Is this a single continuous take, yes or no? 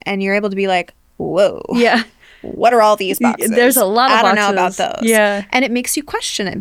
yes